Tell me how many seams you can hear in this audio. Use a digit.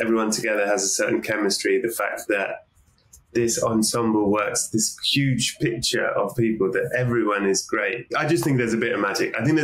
0